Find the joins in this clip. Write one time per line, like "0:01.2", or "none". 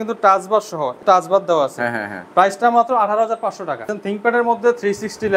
0:01.0
0:03.9